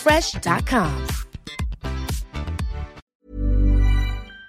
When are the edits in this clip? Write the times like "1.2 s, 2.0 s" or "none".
3.0 s